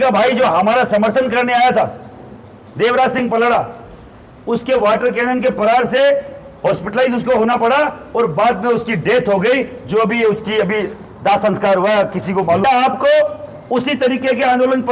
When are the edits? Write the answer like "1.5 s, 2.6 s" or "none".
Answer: 12.6 s

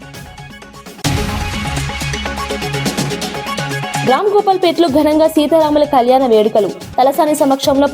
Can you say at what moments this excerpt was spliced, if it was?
1.0 s, 4.0 s

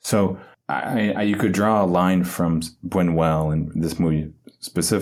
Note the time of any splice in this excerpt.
none

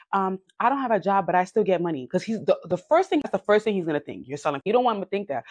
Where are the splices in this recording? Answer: 3.3 s, 4.7 s

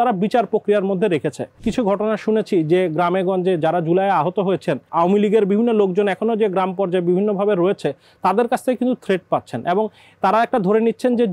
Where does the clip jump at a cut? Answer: 1.6 s, 4.9 s

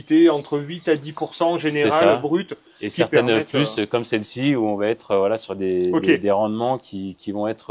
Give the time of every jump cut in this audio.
none

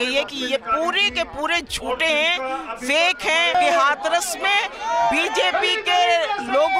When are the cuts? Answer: 3.5 s

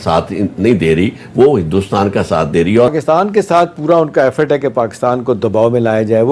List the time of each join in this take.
2.9 s

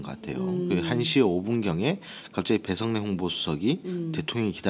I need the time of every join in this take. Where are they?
2.7 s

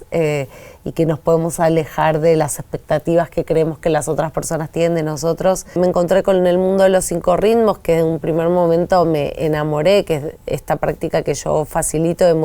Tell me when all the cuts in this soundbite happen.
5.8 s

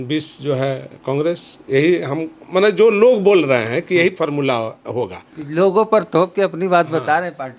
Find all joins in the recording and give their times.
none

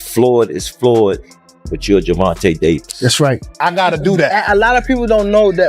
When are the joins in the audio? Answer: 3.9 s

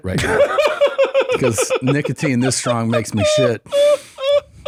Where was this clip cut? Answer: none

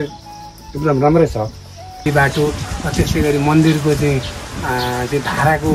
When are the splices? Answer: 2.1 s

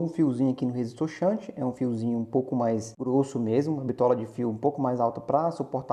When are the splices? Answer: none

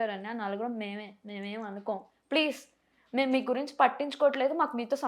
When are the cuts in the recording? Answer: none

